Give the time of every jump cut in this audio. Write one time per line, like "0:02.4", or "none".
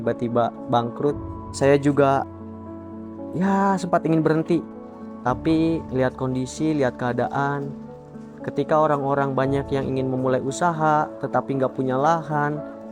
0:01.2